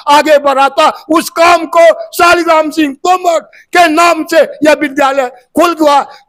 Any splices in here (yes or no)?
no